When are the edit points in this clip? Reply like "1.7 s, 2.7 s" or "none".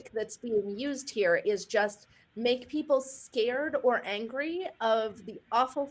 none